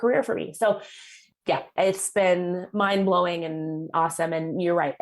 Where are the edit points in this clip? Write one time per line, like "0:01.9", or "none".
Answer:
0:01.1